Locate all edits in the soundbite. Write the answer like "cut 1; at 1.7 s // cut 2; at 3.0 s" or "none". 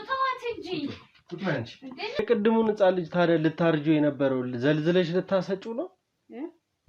cut 1; at 2.2 s